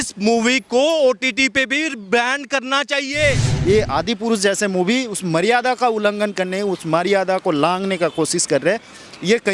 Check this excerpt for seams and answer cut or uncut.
cut